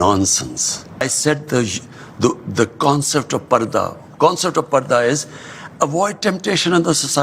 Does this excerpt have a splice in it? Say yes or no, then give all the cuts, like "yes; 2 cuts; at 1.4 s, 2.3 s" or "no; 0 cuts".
yes; 1 cut; at 1.0 s